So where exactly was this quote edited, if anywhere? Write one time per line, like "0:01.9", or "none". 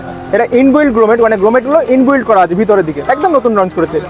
0:03.0